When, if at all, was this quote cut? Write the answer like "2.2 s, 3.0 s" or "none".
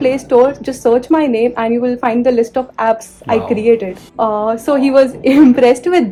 none